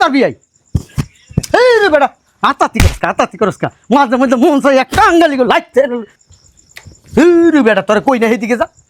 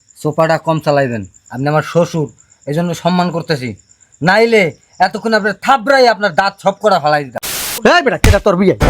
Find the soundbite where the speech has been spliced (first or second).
second